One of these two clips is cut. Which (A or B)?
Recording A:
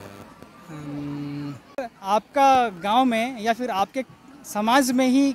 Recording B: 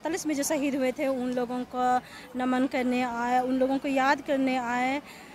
A